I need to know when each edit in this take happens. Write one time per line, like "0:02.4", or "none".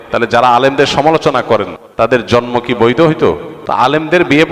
0:01.8
0:03.5